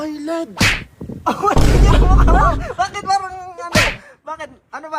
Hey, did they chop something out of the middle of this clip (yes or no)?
no